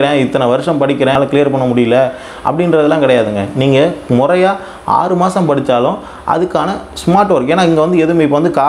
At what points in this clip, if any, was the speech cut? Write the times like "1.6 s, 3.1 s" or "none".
1.2 s